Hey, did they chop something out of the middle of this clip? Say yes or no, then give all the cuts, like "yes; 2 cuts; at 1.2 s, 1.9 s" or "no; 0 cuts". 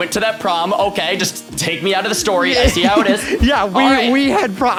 no; 0 cuts